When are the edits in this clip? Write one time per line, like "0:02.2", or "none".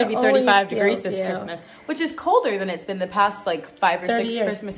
none

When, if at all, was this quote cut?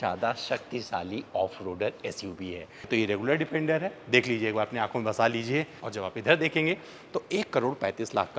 0:02.9
0:05.8

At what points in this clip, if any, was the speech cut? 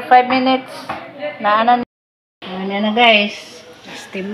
0:01.8

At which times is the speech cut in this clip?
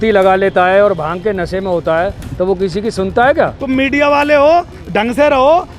0:03.6

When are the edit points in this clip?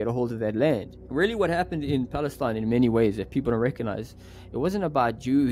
0:01.0

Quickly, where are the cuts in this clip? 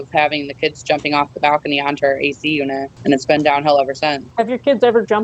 0:02.9
0:04.2

